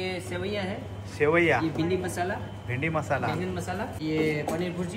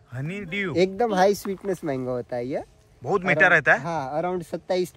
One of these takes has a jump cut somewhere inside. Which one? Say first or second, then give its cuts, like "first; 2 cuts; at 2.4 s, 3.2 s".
first; 1 cut; at 3.9 s